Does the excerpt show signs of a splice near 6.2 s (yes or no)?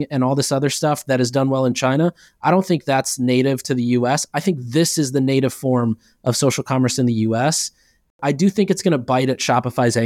no